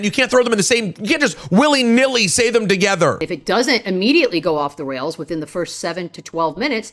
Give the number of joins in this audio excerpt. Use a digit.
1